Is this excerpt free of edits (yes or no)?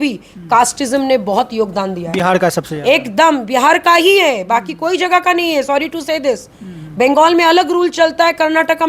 yes